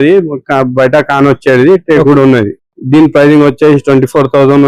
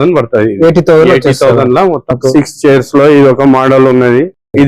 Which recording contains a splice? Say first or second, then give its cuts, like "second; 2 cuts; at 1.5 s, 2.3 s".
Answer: second; 1 cut; at 2.1 s